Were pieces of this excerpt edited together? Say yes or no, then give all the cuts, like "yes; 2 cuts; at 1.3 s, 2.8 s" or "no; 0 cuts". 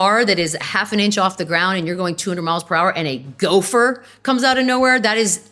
no; 0 cuts